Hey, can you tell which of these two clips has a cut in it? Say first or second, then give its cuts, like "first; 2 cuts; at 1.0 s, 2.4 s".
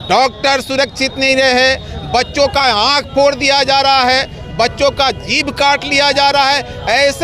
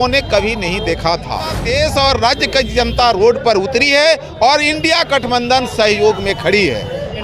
second; 1 cut; at 1.6 s